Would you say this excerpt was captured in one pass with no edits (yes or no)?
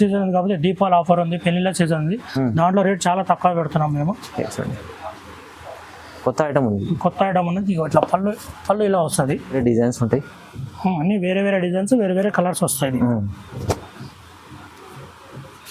no